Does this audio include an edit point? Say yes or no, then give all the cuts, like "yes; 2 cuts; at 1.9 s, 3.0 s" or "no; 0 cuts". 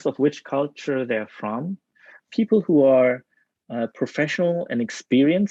no; 0 cuts